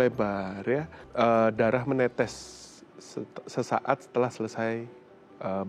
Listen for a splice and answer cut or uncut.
cut